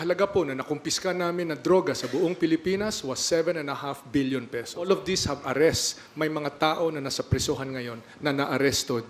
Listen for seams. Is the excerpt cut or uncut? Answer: cut